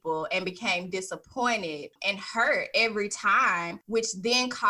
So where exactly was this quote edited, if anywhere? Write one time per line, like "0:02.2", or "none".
0:02.0
0:03.8